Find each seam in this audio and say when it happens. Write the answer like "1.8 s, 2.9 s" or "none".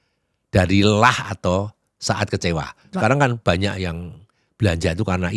2.9 s